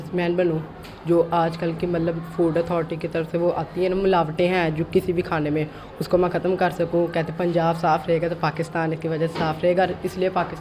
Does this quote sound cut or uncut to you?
uncut